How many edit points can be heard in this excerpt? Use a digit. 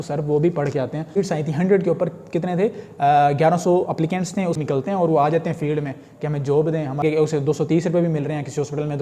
3